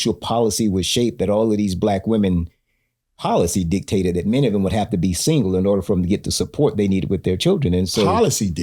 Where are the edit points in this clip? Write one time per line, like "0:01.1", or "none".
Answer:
none